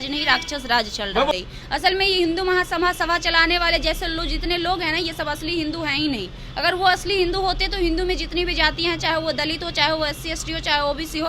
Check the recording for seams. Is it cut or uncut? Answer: cut